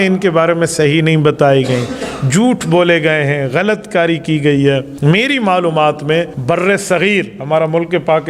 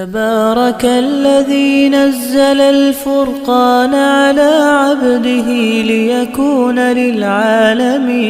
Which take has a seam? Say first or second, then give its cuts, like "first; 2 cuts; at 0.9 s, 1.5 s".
first; 2 cuts; at 4.9 s, 6.3 s